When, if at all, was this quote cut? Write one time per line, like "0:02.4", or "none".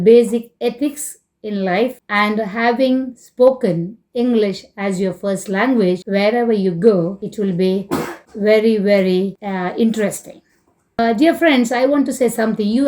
0:02.0
0:06.0
0:07.2
0:08.2
0:09.4
0:11.0